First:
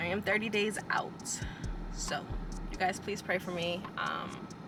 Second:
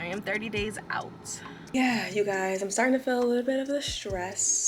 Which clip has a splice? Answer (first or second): second